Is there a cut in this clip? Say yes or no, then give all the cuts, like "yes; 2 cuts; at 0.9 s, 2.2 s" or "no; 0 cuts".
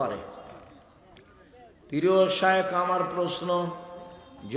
no; 0 cuts